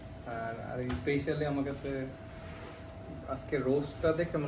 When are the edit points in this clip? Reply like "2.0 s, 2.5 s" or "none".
none

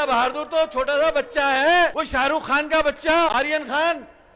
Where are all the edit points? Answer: 2.0 s, 3.3 s

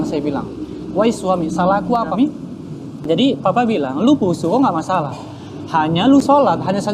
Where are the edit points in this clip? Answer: 2.1 s

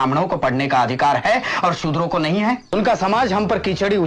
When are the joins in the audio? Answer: 2.7 s

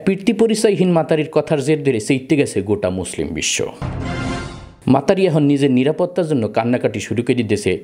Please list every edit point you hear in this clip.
none

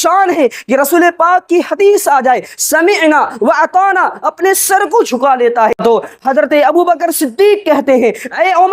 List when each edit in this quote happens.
5.8 s

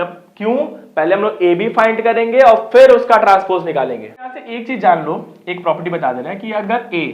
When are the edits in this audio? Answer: 4.5 s

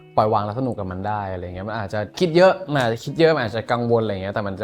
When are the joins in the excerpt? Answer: 2.1 s

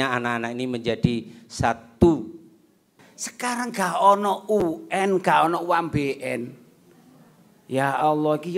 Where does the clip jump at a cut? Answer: 3.0 s

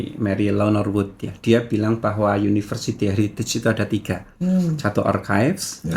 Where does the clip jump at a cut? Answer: none

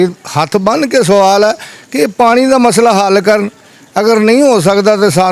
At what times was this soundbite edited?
none

